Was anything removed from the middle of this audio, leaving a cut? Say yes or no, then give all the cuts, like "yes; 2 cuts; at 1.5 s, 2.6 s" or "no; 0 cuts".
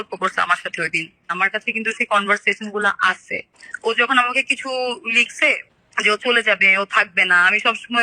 yes; 1 cut; at 1.3 s